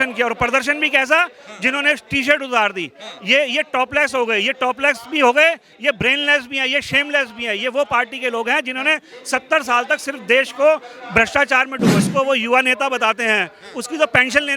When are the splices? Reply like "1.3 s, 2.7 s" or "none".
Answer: 12.0 s